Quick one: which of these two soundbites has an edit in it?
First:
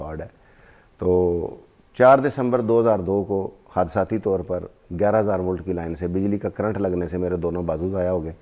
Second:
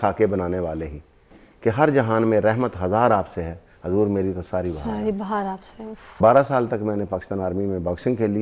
second; 1 cut; at 6.2 s

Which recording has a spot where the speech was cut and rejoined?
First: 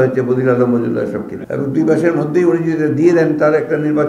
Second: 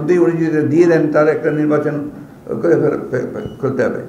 first; 1 cut; at 1.3 s

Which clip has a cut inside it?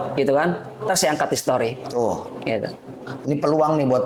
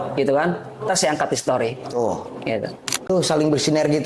second; 1 cut; at 3.1 s

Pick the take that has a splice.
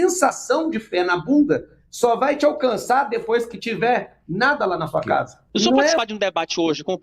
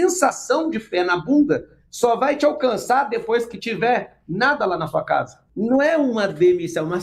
first; 1 cut; at 6.0 s

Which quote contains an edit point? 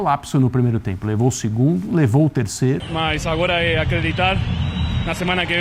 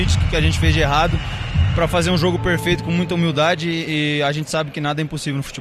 first; 1 cut; at 2.9 s

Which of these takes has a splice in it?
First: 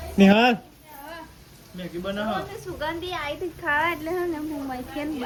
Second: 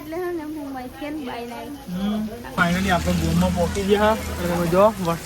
second; 1 cut; at 2.5 s

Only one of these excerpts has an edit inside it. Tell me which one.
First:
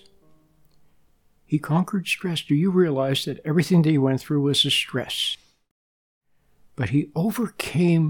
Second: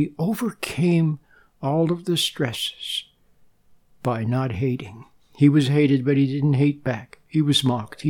first; 1 cut; at 5.9 s

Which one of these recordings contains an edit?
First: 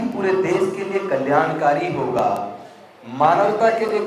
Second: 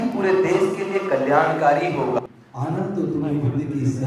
second; 1 cut; at 2.2 s

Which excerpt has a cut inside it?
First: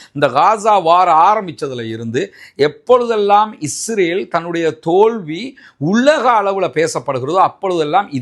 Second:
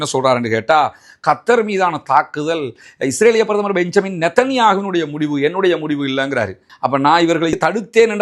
second; 1 cut; at 6.6 s

